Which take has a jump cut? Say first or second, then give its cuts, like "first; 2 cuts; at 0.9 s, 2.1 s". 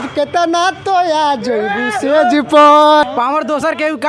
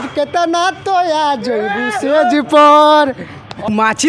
first; 1 cut; at 3.0 s